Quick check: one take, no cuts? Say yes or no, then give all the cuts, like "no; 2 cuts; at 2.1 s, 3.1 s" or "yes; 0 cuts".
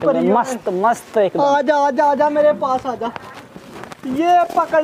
yes; 0 cuts